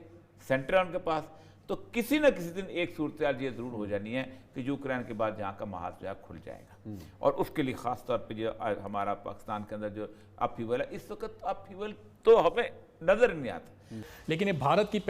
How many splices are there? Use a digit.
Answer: 1